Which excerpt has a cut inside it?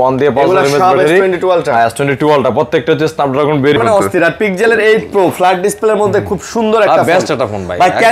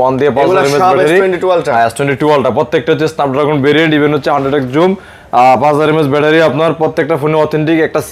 first; 1 cut; at 3.8 s

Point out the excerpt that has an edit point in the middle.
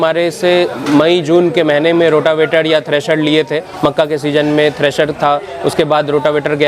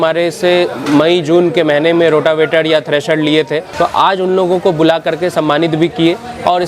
second; 1 cut; at 3.7 s

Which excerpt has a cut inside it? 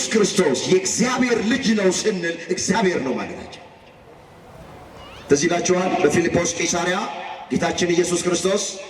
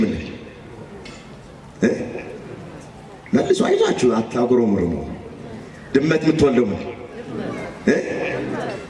first; 1 cut; at 4.6 s

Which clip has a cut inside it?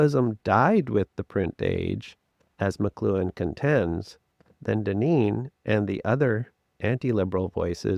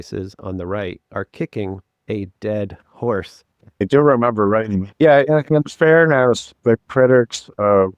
second; 3 cuts; at 3.8 s, 4.9 s, 6.5 s

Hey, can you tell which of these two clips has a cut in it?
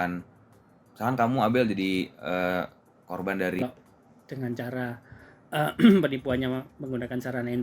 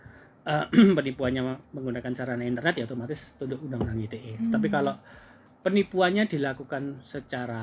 first; 1 cut; at 3.6 s

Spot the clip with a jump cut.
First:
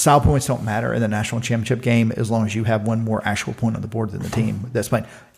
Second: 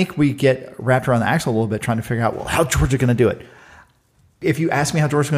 second; 1 cut; at 4.4 s

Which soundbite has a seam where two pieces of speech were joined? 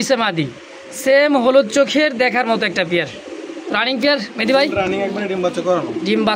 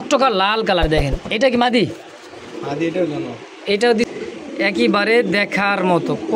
second; 1 cut; at 4.1 s

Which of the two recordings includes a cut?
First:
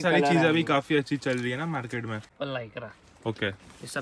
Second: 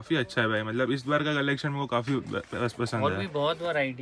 first; 1 cut; at 2.3 s

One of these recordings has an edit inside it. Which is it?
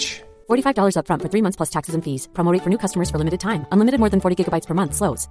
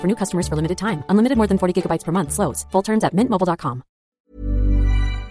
second; 1 cut; at 4.1 s

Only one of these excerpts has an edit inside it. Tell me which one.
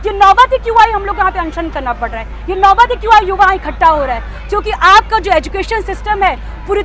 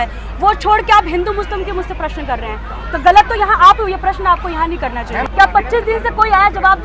second; 1 cut; at 5.2 s

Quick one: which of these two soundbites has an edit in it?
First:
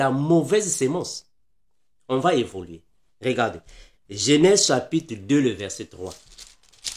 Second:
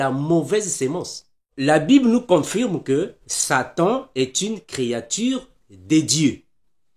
second; 1 cut; at 1.5 s

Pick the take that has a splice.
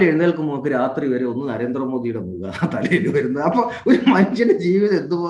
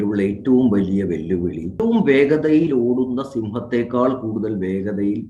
second; 1 cut; at 1.7 s

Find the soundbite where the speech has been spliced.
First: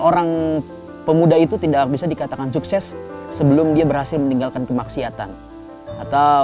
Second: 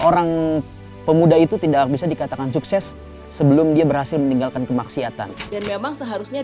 second; 1 cut; at 5.4 s

